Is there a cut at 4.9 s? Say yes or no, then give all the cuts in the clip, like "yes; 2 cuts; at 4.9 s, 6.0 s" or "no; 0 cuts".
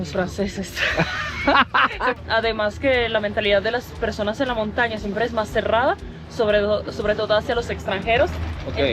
no; 1 cut; at 2.2 s